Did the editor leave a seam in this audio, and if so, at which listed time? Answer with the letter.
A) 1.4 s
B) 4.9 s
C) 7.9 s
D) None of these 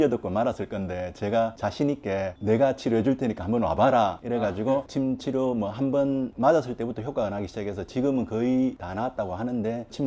B